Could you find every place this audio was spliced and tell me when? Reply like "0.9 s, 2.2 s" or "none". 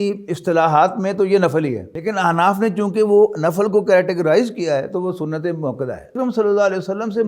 1.9 s, 6.1 s